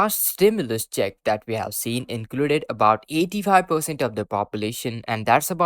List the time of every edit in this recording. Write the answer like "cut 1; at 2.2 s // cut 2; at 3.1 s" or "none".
none